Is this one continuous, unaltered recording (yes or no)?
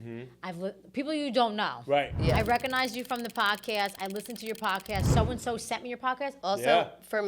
no